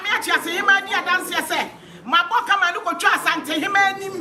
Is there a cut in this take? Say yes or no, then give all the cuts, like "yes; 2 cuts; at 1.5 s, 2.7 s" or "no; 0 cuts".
no; 0 cuts